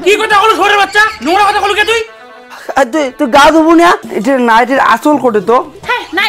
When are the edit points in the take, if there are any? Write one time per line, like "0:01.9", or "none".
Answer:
0:04.1